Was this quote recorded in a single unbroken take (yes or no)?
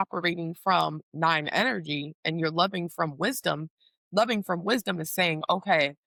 yes